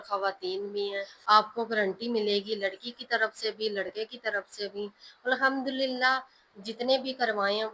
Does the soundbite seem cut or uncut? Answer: cut